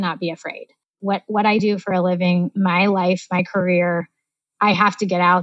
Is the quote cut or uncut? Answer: cut